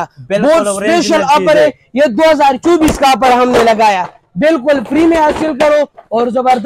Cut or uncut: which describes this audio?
uncut